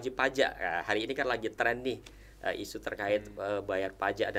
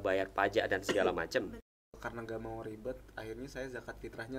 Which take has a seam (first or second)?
second